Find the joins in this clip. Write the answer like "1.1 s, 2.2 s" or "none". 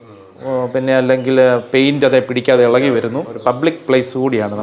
3.3 s